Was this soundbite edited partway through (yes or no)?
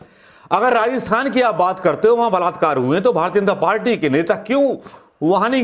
no